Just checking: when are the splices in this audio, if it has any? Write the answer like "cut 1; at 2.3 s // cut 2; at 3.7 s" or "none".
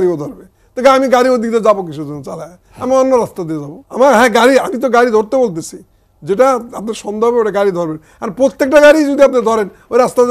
cut 1; at 3.8 s

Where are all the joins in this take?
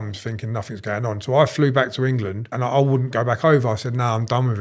cut 1; at 2.5 s

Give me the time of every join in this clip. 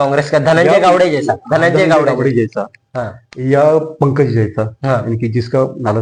none

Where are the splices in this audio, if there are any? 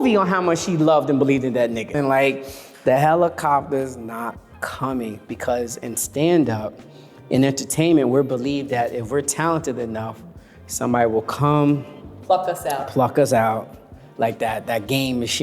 cut 1; at 1.8 s

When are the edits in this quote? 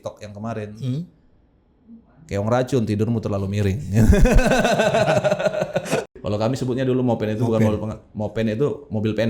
cut 1; at 6.2 s

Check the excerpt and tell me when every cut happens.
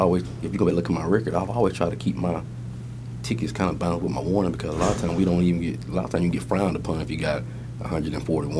none

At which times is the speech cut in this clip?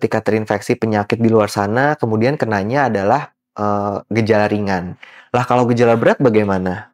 none

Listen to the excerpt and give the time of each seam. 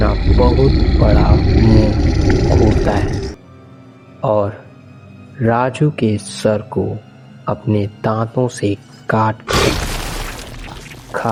none

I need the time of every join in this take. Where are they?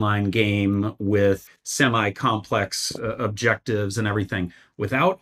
cut 1; at 1.5 s

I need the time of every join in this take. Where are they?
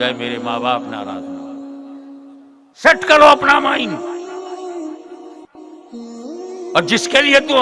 cut 1; at 0.8 s // cut 2; at 2.8 s // cut 3; at 3.9 s // cut 4; at 6.3 s

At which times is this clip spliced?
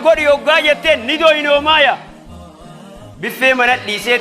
none

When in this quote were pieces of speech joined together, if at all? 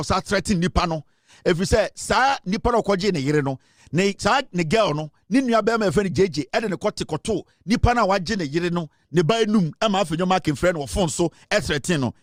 none

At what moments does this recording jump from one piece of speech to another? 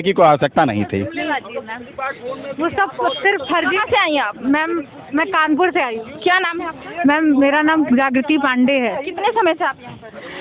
none

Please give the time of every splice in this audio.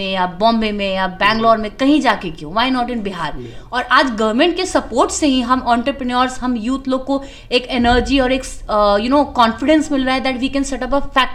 none

